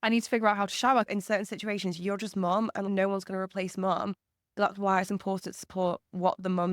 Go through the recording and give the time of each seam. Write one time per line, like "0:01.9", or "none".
0:01.1